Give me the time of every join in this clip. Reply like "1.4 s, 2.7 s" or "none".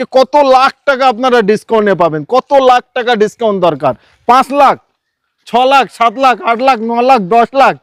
none